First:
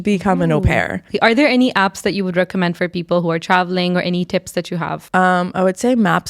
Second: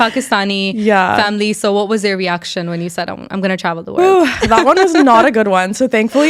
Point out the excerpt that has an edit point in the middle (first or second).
first